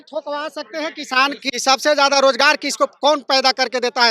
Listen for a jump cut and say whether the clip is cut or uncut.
cut